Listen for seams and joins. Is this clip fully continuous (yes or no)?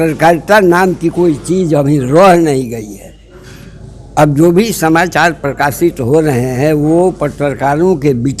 yes